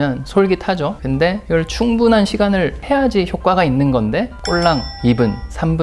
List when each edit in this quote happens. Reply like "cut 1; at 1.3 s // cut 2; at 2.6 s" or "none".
cut 1; at 1.2 s // cut 2; at 4.9 s